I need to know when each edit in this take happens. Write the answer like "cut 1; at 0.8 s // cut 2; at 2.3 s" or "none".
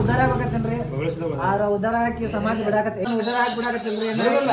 cut 1; at 3.1 s

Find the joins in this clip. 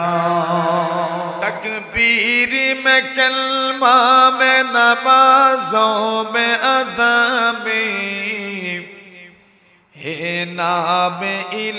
cut 1; at 1.4 s

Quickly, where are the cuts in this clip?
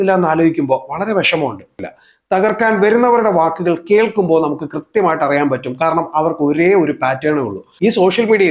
cut 1; at 1.9 s // cut 2; at 7.6 s

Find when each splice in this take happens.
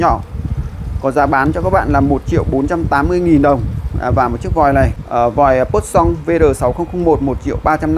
cut 1; at 5.0 s

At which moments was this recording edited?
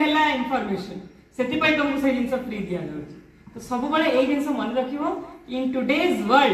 none

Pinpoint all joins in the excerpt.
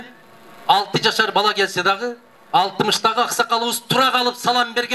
none

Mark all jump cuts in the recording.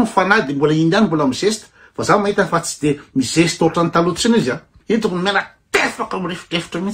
cut 1; at 4.7 s

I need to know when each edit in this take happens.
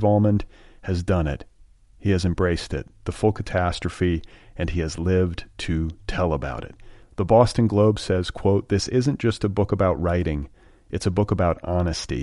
none

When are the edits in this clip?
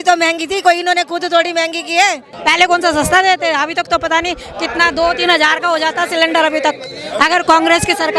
cut 1; at 2.3 s

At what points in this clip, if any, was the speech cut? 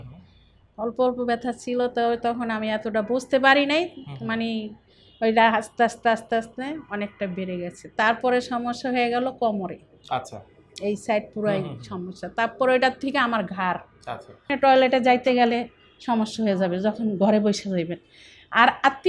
cut 1; at 14.5 s

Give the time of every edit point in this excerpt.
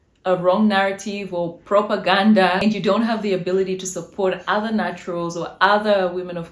cut 1; at 2.6 s

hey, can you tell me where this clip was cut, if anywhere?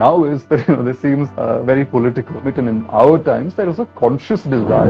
cut 1; at 1.3 s // cut 2; at 2.5 s

